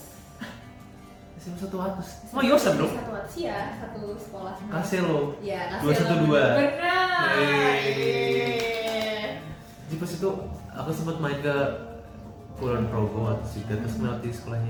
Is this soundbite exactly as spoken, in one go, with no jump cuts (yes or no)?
yes